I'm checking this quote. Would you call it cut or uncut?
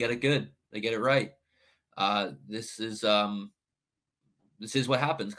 uncut